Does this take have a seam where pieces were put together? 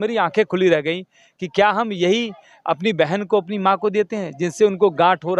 no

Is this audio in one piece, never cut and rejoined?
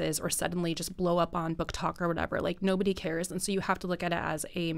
yes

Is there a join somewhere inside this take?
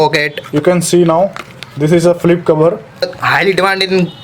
yes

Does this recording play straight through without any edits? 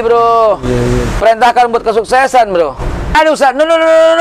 no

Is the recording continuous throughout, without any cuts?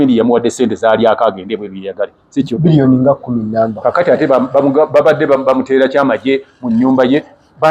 yes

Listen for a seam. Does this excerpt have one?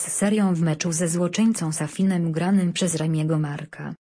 no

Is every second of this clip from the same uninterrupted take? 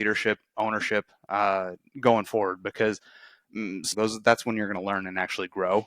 no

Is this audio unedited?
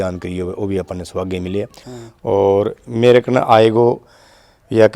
no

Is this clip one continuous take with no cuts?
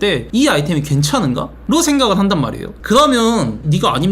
no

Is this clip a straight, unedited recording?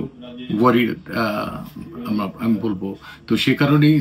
yes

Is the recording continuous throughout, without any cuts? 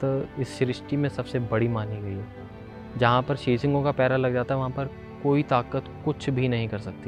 yes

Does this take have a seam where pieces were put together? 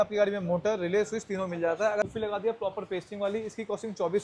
yes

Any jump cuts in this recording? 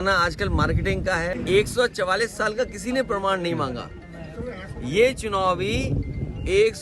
yes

